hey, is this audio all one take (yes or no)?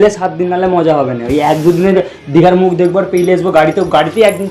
yes